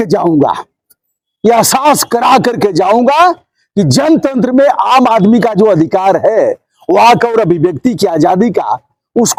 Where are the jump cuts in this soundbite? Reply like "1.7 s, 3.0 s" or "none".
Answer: none